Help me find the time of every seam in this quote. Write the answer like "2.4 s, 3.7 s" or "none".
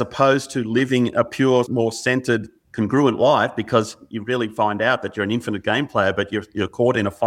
1.7 s, 2.6 s

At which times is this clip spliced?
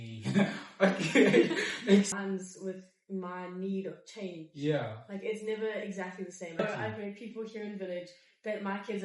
2.2 s, 6.6 s

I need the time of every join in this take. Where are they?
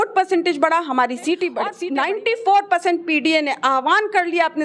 1.7 s

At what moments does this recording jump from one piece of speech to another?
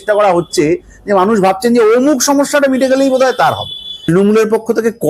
3.9 s

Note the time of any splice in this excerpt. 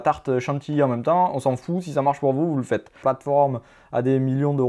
3.0 s

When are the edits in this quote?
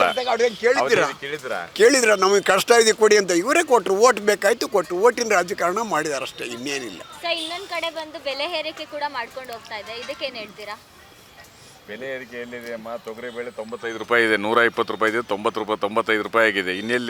none

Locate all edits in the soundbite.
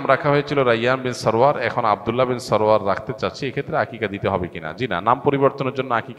none

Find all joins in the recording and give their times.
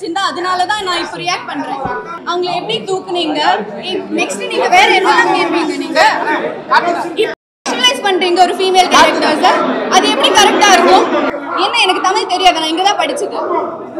2.2 s, 11.4 s

